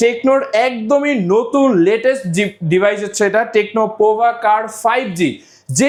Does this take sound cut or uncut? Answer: uncut